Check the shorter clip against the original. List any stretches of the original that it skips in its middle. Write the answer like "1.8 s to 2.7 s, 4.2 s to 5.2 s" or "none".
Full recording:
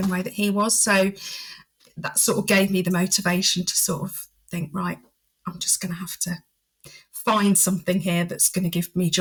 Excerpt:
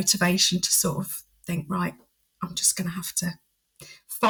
none

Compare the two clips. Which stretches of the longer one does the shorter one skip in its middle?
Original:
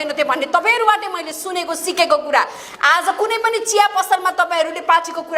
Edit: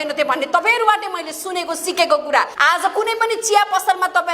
2.5 s to 2.8 s

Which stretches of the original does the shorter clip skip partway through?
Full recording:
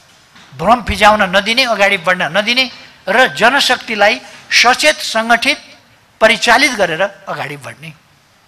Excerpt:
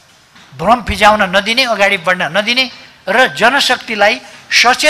none

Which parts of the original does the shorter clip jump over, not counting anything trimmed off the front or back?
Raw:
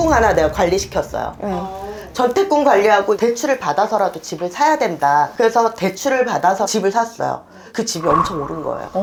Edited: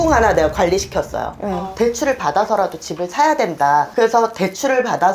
1.8 s to 3.2 s

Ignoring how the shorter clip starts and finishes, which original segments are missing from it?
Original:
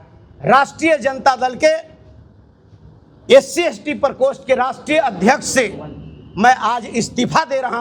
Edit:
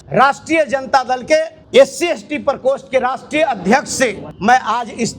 1.9 s to 3.1 s, 5.8 s to 6.2 s

